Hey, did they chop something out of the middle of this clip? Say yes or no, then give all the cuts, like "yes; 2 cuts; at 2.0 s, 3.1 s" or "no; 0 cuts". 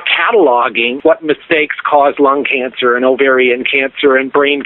yes; 1 cut; at 1.0 s